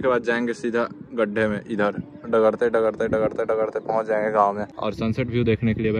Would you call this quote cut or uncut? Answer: cut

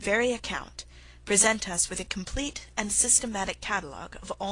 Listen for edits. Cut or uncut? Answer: cut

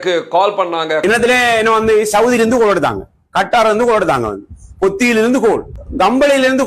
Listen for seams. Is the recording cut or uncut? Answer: cut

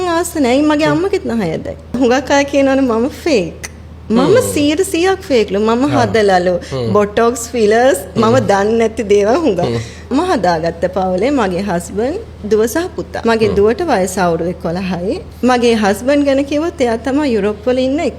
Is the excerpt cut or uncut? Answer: cut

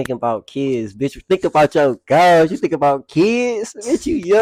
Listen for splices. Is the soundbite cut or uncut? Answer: uncut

